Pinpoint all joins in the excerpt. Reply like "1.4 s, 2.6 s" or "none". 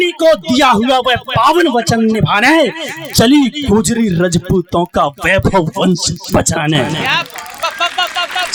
none